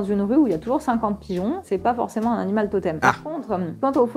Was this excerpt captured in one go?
no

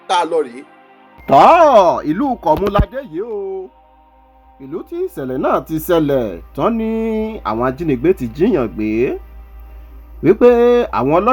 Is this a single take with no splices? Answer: no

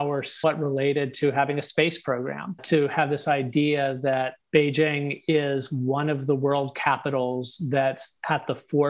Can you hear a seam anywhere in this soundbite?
no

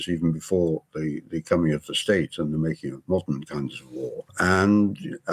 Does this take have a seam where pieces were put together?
yes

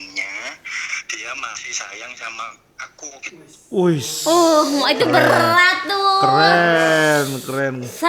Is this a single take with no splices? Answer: yes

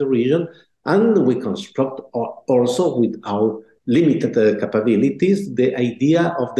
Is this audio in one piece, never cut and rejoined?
yes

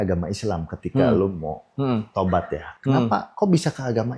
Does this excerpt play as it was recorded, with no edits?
no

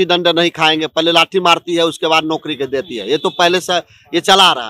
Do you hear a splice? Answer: no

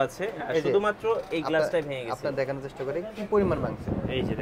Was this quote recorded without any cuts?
yes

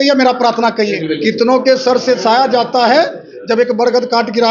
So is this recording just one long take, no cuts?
no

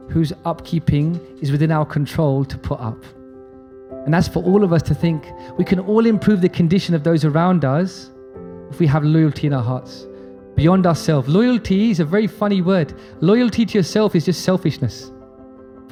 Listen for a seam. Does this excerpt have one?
no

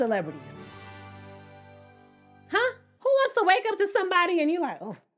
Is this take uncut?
no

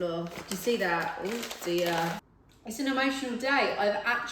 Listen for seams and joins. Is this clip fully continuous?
no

